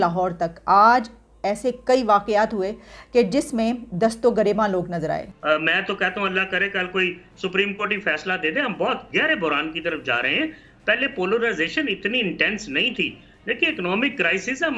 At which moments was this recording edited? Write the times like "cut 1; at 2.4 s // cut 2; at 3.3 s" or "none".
cut 1; at 5.3 s